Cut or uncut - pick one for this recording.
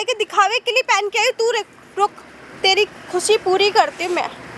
uncut